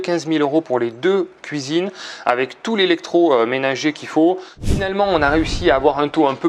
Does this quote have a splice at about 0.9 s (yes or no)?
no